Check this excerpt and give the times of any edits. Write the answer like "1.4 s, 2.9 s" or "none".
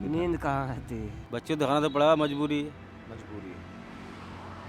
1.2 s